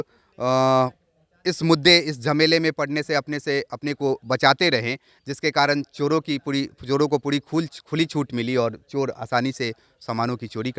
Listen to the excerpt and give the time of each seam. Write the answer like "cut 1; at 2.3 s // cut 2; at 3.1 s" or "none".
none